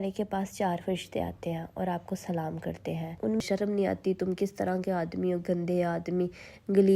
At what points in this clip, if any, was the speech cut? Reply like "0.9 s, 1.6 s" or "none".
3.4 s

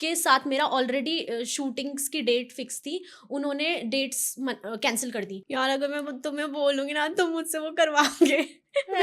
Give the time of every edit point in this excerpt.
5.4 s

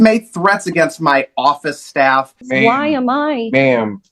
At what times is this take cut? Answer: 2.5 s

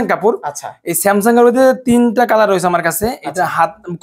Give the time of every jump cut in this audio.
none

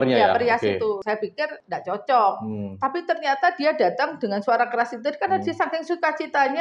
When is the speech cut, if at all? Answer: 1.3 s

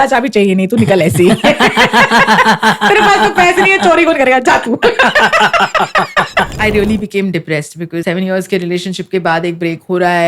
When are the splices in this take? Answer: 6.5 s, 8.0 s

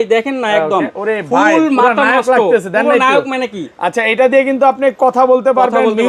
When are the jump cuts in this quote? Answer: none

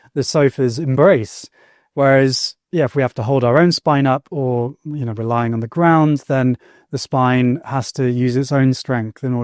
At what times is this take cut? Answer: none

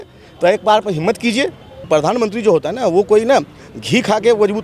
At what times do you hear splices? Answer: 1.7 s

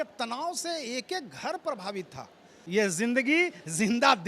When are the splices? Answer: 2.5 s

